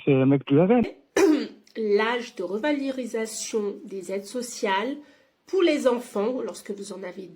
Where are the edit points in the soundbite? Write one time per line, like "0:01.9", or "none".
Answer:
0:01.0

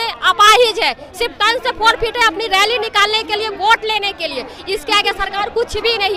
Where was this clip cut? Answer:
none

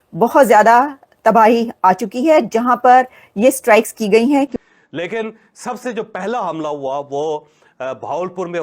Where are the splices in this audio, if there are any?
0:04.5

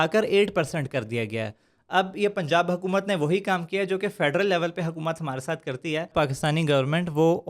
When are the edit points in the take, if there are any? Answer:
0:06.1

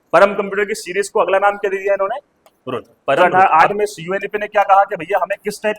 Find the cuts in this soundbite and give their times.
0:03.2

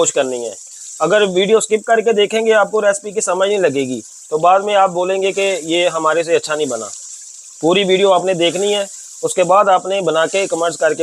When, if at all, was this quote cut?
none

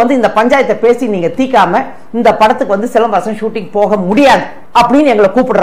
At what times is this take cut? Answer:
0:04.6

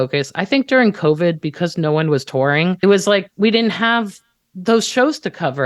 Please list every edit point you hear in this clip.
0:02.8

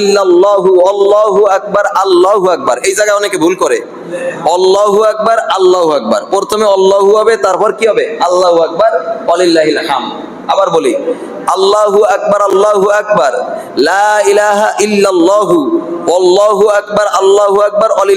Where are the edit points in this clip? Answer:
none

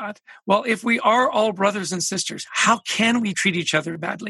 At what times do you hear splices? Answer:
0:03.4

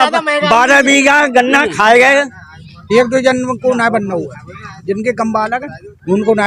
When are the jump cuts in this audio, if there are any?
0:02.4

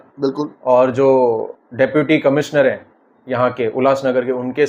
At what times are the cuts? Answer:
none

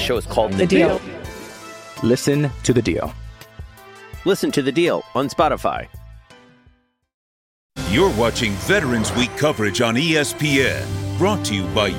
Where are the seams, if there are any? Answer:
0:07.8

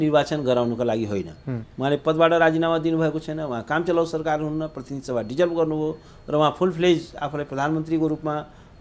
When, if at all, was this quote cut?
none

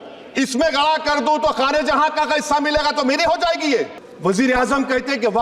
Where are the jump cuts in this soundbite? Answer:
0:04.0

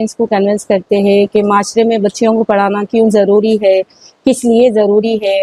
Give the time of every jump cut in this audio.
none

